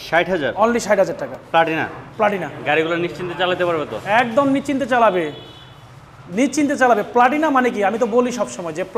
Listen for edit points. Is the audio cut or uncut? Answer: uncut